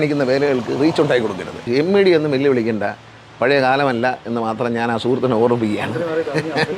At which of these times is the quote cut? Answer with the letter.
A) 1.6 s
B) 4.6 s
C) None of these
A